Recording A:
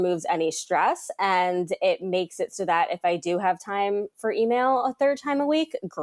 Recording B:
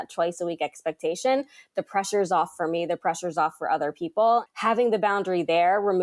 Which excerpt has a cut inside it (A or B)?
B